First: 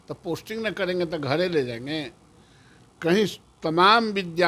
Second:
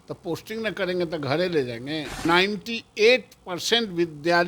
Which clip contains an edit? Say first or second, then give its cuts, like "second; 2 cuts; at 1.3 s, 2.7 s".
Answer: second; 1 cut; at 2.3 s